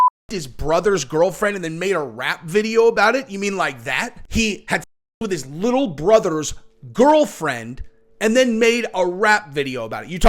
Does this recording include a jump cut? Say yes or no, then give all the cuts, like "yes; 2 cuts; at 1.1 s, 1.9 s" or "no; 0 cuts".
yes; 1 cut; at 4.2 s